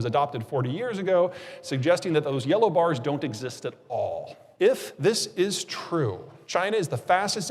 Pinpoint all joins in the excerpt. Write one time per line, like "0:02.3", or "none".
0:04.4
0:06.3